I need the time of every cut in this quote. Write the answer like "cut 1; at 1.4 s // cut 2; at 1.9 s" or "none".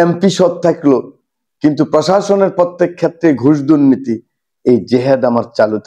none